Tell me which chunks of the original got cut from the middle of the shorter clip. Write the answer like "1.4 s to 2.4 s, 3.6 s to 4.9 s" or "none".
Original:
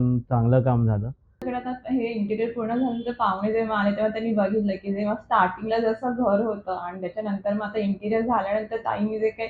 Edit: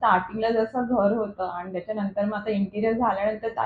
none